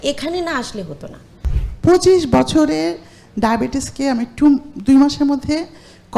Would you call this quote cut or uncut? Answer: cut